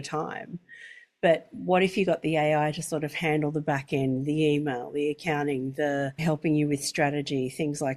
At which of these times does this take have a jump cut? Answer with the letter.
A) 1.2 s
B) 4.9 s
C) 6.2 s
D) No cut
C